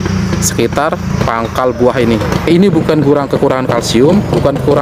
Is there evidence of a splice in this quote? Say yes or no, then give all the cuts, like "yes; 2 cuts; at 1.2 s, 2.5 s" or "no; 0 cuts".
yes; 2 cuts; at 1.1 s, 2.5 s